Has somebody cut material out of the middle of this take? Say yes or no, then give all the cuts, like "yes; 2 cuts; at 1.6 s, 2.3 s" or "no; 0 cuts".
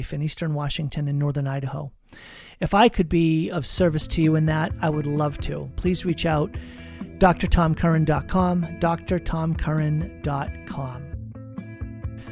yes; 1 cut; at 11.0 s